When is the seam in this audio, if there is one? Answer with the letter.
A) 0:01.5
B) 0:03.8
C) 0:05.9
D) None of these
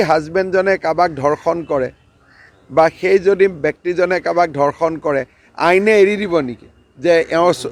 D